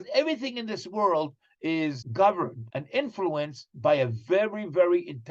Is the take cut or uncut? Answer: cut